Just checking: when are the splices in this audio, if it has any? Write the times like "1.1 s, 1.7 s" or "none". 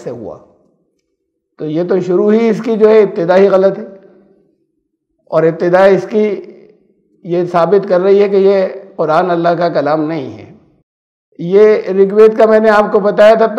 none